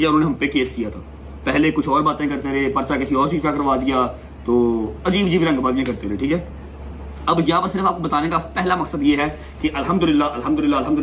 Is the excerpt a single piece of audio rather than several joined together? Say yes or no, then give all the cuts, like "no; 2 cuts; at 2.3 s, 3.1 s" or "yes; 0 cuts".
yes; 0 cuts